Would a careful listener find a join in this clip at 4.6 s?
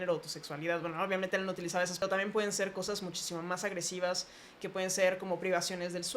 no; 1 cut; at 2.0 s

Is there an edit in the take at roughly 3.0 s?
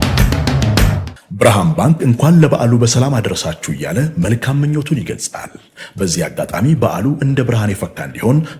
no; 1 cut; at 1.1 s

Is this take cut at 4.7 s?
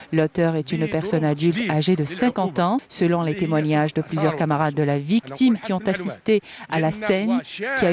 yes; 1 cut; at 4.7 s

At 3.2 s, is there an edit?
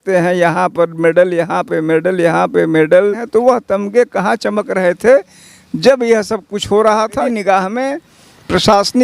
yes; 2 cuts; at 3.2 s, 7.3 s

